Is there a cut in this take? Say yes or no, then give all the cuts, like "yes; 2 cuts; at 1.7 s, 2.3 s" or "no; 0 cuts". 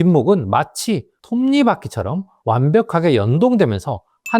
yes; 2 cuts; at 1.1 s, 2.3 s